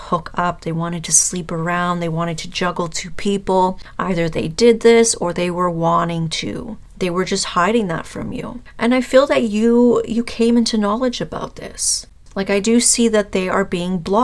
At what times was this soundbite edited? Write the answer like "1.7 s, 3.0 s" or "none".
none

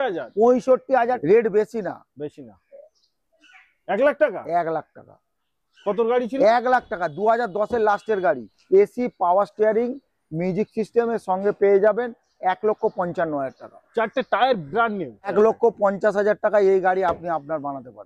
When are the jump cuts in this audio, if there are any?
1.2 s, 8.5 s, 15.3 s

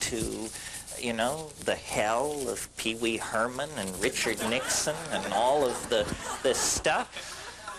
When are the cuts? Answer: 3.8 s

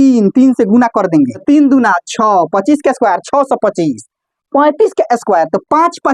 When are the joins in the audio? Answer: 1.4 s

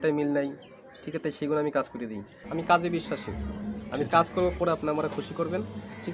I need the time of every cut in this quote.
2.4 s

